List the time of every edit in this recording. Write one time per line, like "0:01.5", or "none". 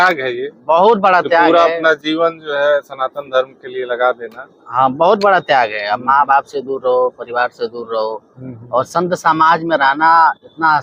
none